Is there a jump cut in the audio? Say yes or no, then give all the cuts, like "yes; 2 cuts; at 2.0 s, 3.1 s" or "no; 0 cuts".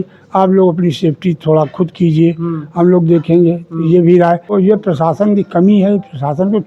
yes; 1 cut; at 4.5 s